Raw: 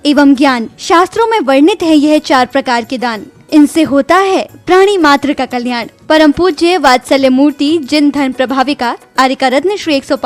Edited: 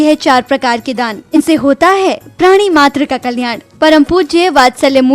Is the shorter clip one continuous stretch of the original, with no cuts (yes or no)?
no